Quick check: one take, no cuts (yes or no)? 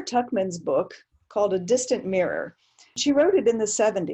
no